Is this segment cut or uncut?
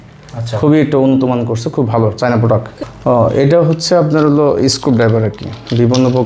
cut